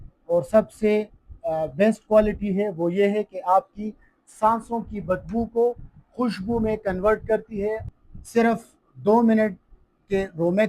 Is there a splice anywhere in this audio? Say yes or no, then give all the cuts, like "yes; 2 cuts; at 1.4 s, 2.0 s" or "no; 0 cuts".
yes; 1 cut; at 7.9 s